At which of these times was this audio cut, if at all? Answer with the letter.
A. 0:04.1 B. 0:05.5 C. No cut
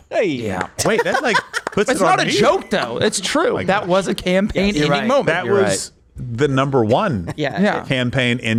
C